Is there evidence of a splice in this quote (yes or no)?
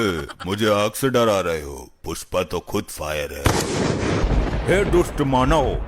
yes